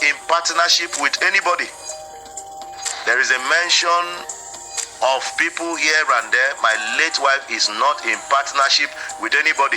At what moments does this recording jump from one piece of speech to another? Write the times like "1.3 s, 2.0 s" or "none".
1.8 s, 3.0 s